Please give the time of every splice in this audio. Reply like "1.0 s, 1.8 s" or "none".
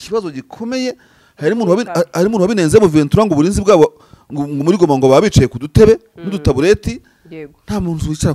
none